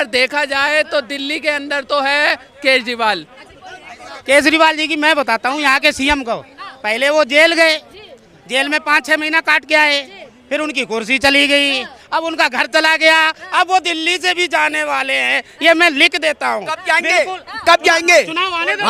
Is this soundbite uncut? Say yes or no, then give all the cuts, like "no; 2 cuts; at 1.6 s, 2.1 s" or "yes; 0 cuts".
no; 1 cut; at 3.4 s